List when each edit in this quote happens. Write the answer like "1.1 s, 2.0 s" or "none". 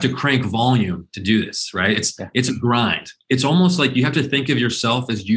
3.1 s